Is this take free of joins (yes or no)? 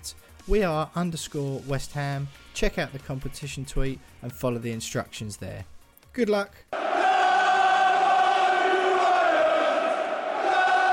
no